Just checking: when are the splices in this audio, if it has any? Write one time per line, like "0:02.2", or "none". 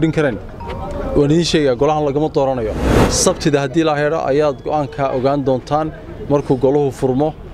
0:02.9